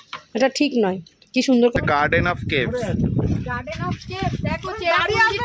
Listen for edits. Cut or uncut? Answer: cut